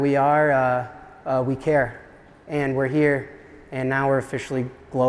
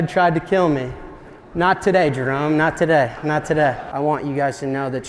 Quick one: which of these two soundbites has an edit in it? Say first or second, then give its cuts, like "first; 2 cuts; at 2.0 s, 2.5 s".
second; 1 cut; at 3.9 s